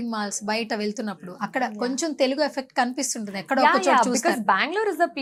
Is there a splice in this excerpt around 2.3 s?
no; 0 cuts

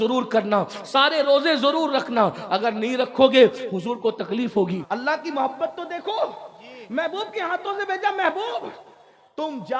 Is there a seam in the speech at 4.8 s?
yes; 1 cut; at 4.8 s

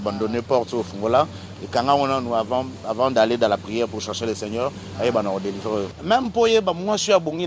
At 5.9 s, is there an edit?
yes; 1 cut; at 5.9 s

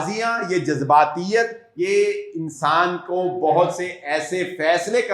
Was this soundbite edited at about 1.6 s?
yes; 1 cut; at 1.6 s

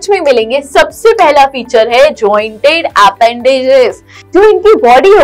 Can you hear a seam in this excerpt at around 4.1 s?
yes; 1 cut; at 4.1 s

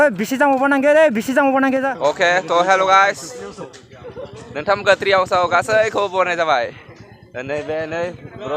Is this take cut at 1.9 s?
yes; 1 cut; at 1.9 s

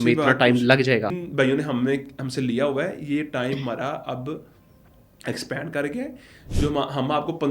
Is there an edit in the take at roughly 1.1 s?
yes; 1 cut; at 1.1 s

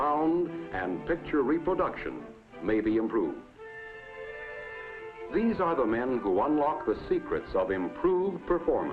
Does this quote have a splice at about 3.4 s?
yes; 1 cut; at 3.4 s

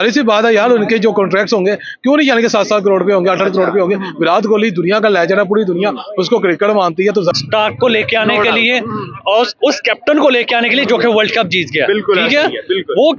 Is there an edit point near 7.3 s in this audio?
yes; 1 cut; at 7.3 s

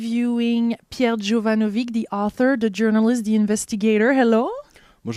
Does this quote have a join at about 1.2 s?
no; 0 cuts

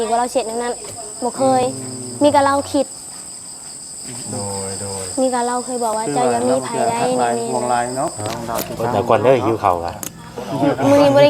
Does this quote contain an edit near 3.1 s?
no; 1 cut; at 8.2 s

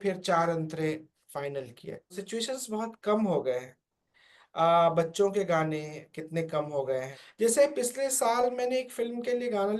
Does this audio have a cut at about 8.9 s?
no; 2 cuts; at 2.2 s, 7.2 s

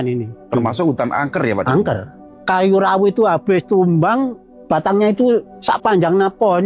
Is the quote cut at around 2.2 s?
yes; 3 cuts; at 2.2 s, 4.5 s, 5.6 s

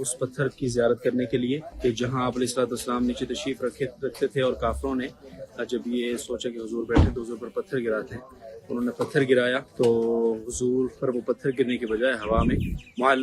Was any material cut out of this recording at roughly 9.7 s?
yes; 2 cuts; at 1.7 s, 9.7 s

